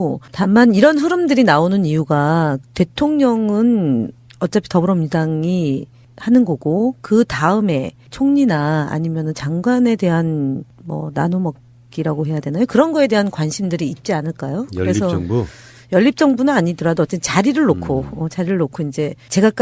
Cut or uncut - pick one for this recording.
uncut